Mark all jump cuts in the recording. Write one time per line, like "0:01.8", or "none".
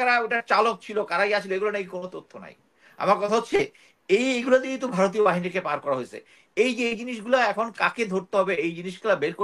none